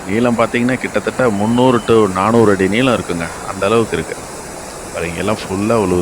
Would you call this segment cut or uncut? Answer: uncut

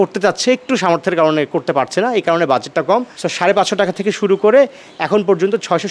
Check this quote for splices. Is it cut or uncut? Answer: cut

